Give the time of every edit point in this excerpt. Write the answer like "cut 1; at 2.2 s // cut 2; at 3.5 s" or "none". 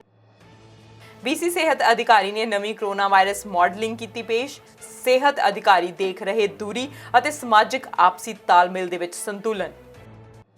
cut 1; at 1.0 s